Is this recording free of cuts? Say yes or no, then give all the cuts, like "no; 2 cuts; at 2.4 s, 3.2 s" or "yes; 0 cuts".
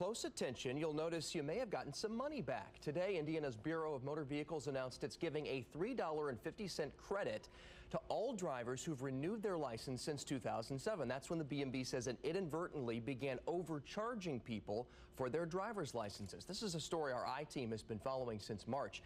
yes; 0 cuts